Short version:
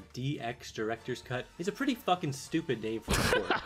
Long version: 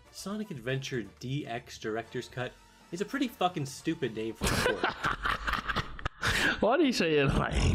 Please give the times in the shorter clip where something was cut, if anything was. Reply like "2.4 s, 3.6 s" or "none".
1.5 s